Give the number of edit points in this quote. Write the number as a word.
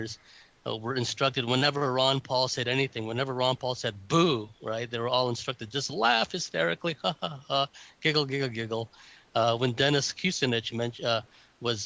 one